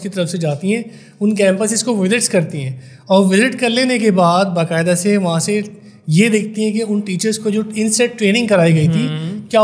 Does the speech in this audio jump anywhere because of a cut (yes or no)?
no